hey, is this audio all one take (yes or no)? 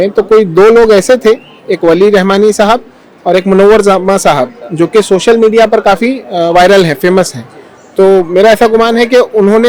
yes